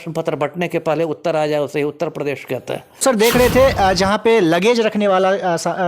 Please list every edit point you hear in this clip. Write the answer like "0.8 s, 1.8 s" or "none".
3.0 s